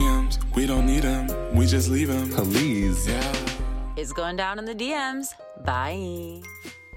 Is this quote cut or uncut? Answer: uncut